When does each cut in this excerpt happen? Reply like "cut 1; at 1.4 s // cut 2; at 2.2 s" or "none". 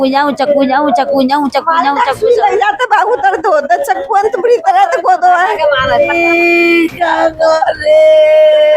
cut 1; at 6.1 s